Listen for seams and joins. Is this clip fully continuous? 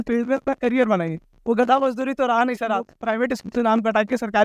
no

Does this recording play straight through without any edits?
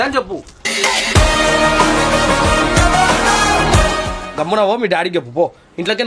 yes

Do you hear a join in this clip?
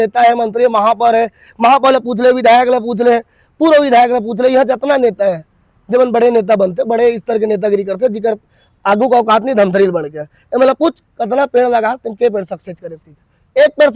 no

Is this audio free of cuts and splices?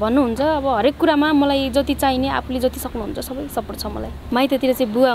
no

